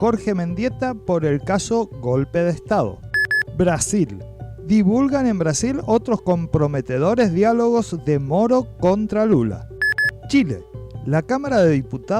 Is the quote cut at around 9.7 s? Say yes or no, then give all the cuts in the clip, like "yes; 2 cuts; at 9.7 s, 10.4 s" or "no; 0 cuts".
yes; 2 cuts; at 3.0 s, 9.7 s